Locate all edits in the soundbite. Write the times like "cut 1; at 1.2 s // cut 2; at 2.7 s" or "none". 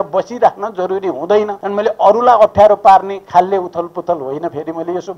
cut 1; at 1.6 s